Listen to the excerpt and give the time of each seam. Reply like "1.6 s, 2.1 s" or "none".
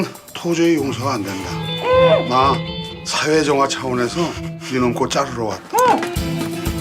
1.6 s